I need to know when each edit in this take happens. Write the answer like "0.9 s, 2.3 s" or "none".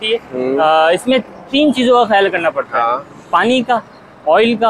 none

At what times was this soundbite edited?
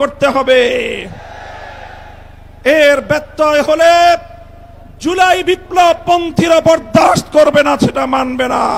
none

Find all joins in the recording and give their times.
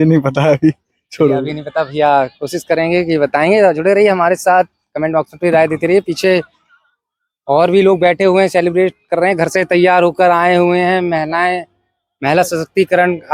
none

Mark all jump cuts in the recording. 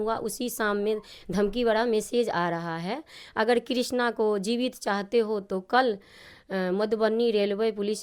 none

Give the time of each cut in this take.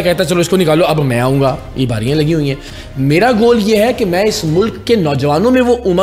2.7 s

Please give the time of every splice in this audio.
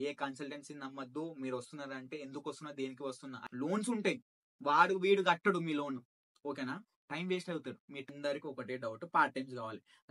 3.4 s, 8.1 s

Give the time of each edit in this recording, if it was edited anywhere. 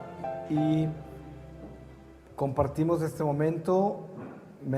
3.5 s

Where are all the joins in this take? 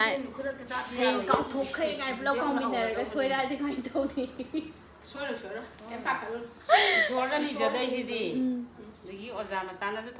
none

